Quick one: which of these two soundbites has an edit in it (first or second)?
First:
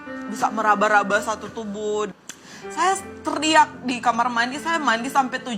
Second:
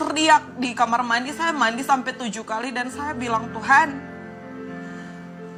first